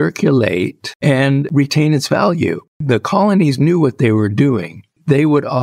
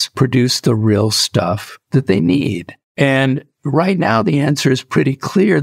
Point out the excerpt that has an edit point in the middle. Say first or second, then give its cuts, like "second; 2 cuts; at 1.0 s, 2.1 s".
first; 2 cuts; at 1.2 s, 2.7 s